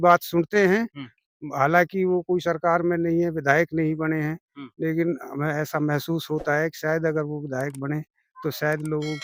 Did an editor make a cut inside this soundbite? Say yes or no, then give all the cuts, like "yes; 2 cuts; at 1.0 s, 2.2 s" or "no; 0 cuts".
no; 0 cuts